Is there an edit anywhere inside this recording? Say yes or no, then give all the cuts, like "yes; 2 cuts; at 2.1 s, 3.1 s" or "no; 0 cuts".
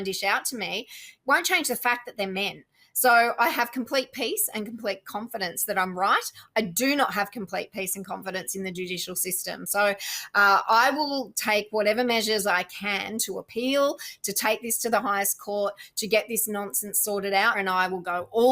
yes; 1 cut; at 17.6 s